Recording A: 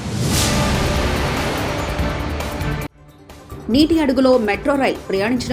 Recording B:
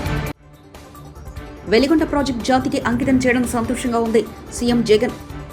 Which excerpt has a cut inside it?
B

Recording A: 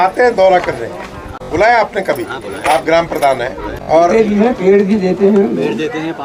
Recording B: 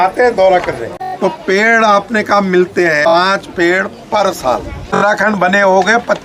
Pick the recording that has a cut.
B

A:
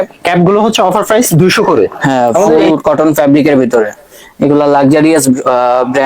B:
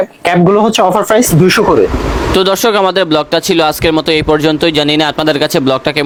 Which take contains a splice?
A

